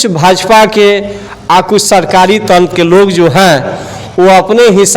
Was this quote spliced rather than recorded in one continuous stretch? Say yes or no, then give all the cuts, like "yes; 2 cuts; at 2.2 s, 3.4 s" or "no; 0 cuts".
no; 0 cuts